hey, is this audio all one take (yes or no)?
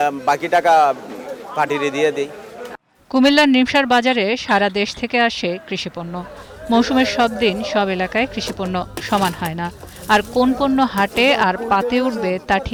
yes